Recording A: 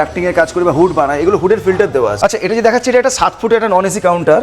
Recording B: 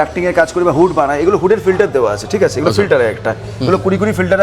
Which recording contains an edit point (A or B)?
A